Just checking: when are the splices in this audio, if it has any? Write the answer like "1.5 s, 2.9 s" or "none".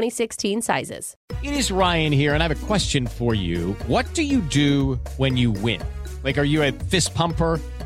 1.1 s